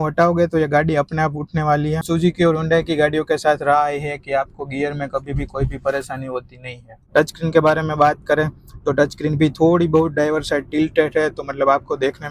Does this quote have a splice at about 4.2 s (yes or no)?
no